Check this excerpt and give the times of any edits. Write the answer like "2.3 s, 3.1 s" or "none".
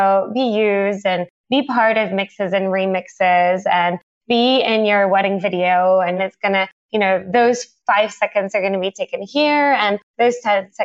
6.2 s